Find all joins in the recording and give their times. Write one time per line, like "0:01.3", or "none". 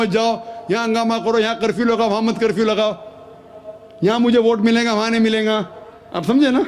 none